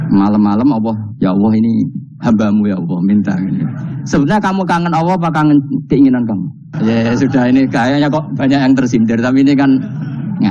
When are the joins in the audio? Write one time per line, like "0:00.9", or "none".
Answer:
0:01.0
0:06.7